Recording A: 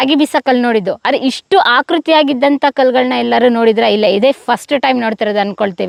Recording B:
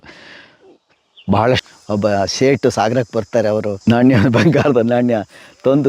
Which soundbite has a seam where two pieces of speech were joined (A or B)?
B